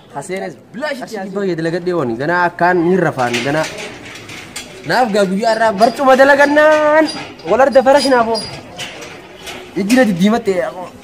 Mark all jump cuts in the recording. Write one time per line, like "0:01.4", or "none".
0:01.1